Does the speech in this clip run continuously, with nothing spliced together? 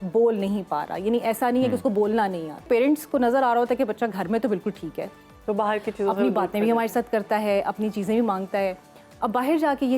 no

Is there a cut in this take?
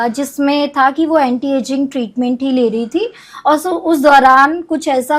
no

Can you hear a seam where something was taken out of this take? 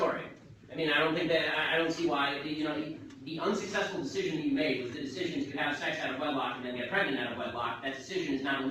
yes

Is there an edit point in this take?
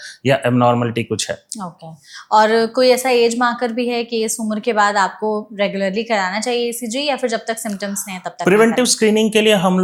no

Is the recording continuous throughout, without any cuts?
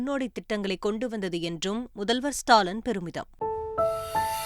no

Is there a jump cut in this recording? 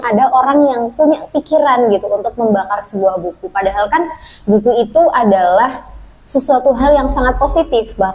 no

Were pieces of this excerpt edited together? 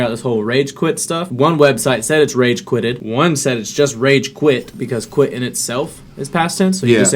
yes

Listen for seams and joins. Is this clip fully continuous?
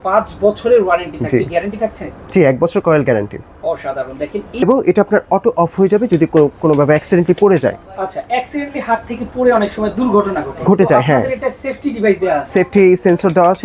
no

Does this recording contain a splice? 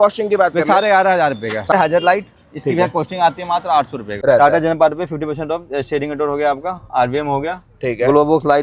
yes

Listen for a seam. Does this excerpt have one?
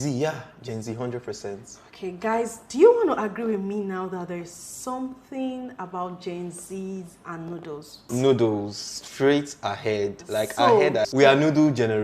yes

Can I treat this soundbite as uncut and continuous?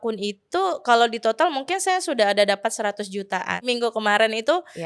no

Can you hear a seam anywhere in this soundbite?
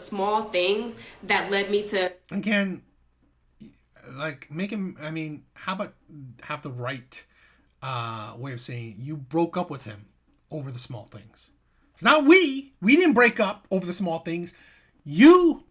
no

